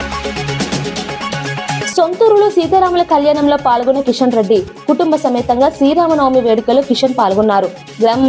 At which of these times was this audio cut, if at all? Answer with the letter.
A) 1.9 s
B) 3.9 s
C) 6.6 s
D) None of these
A